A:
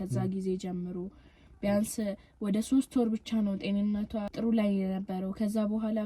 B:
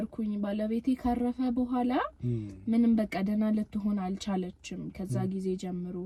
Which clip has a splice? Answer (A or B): A